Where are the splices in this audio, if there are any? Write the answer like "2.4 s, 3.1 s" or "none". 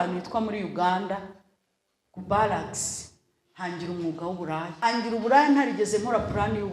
4.7 s